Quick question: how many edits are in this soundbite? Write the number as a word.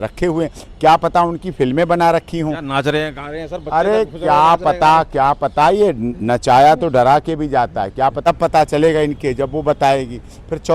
one